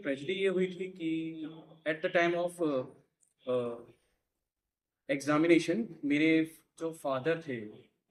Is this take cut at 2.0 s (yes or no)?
no